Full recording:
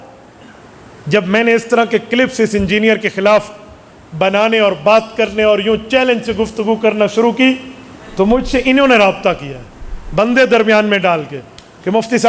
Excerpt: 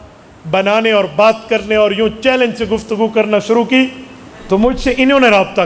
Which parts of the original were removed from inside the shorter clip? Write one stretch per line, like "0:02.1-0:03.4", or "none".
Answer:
none